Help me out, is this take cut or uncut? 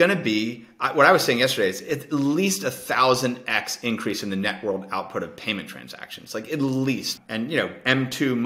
cut